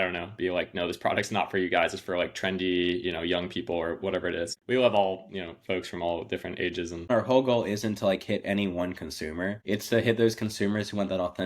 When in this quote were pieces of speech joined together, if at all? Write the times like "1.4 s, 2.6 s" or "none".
4.5 s, 7.1 s, 9.6 s